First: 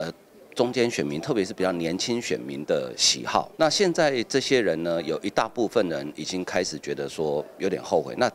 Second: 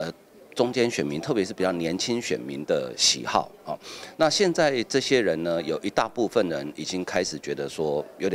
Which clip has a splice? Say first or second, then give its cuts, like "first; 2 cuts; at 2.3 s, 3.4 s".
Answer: first; 1 cut; at 3.5 s